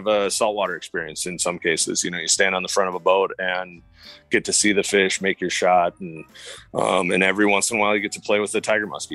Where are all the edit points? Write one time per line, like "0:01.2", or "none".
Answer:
none

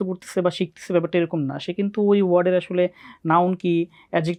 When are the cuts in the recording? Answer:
none

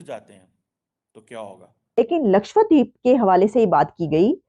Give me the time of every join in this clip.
0:02.0

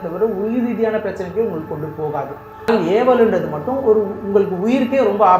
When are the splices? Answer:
0:02.7

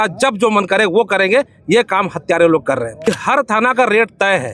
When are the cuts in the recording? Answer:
0:03.1

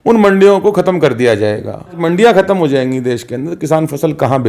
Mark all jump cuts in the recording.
0:02.0

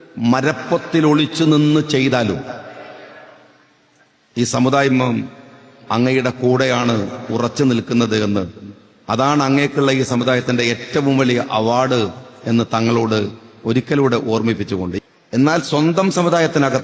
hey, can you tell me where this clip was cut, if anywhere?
0:14.9

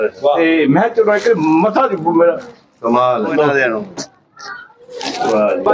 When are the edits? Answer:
0:03.3

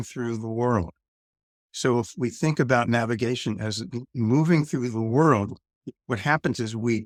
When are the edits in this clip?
none

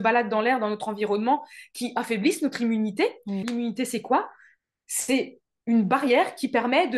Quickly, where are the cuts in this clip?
0:03.4

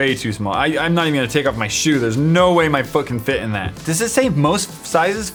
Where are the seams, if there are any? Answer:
none

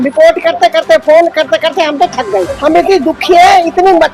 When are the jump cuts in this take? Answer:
0:02.5

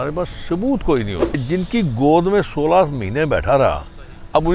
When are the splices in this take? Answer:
0:01.4

